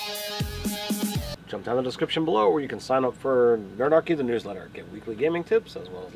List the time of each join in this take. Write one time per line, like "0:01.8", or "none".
0:01.3